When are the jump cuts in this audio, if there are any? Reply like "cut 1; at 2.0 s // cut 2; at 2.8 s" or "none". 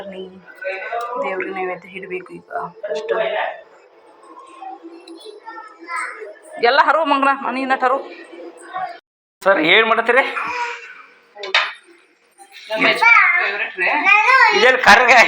cut 1; at 9.3 s